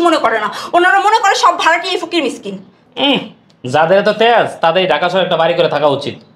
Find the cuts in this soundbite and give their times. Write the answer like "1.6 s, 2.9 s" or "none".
2.8 s